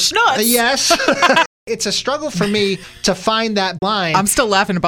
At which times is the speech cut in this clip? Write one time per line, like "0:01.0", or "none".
0:01.5
0:02.9
0:03.8